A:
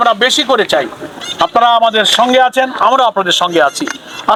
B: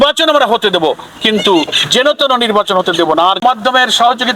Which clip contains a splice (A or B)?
B